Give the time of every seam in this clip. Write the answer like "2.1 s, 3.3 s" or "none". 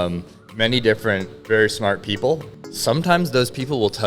1.3 s, 2.5 s